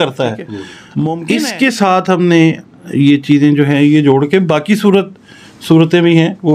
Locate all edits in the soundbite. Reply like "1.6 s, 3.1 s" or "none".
1.2 s